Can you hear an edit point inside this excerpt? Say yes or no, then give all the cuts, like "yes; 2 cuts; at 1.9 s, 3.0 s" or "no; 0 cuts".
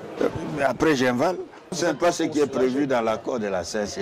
yes; 1 cut; at 1.7 s